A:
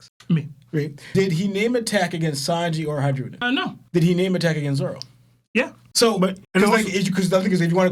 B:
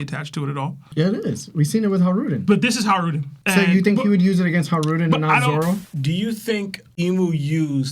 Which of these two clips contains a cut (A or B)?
B